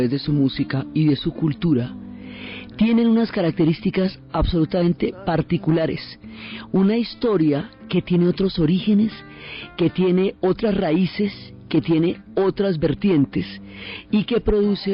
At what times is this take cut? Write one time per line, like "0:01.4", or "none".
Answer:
0:10.6